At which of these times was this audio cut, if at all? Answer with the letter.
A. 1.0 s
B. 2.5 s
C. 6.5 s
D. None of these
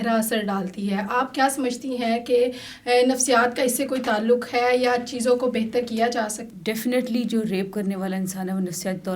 C